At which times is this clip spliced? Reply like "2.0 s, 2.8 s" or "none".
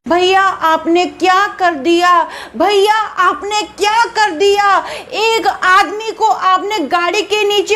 none